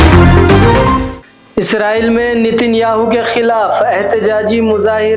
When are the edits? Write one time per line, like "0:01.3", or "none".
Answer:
0:01.2